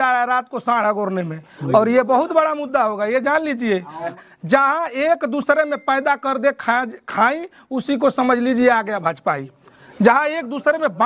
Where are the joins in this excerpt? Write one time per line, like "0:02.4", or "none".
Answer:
0:04.1